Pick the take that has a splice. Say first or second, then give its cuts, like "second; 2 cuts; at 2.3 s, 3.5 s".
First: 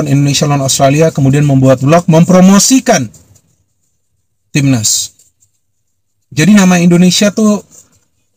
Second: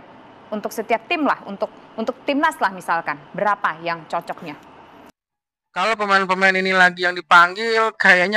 second; 1 cut; at 5.0 s